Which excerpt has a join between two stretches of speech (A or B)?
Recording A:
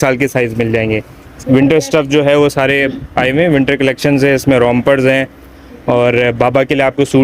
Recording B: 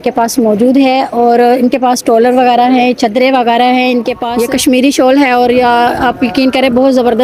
B